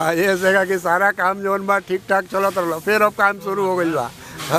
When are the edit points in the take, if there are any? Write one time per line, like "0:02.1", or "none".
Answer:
none